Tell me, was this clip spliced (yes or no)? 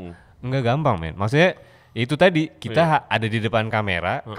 no